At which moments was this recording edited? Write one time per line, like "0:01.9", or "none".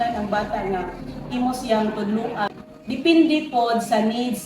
0:02.5